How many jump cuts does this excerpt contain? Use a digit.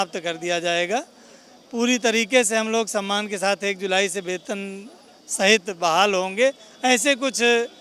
0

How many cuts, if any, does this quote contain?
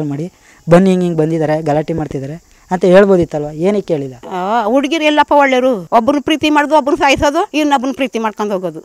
3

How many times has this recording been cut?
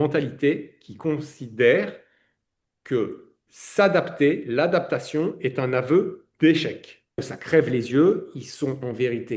1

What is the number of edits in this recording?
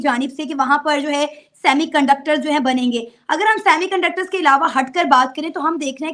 0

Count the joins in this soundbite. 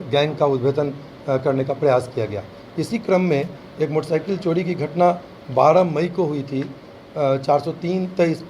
0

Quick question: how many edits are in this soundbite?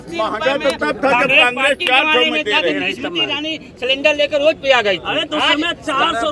0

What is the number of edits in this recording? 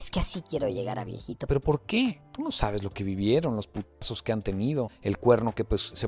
2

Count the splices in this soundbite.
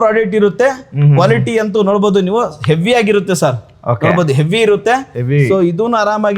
0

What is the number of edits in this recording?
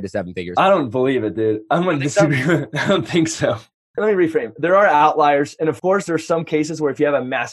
2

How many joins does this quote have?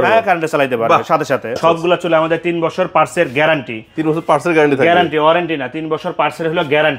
1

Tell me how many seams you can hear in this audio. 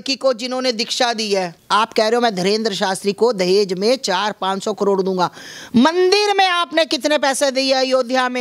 1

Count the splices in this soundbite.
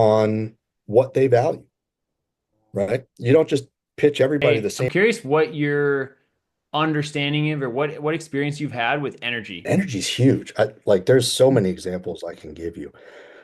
2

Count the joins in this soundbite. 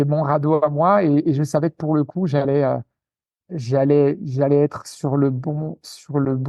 0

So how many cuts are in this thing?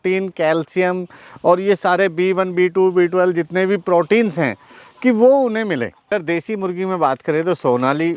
1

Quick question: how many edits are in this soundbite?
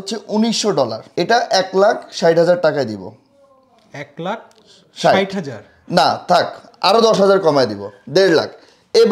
1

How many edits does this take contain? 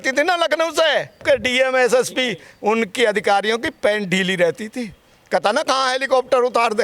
1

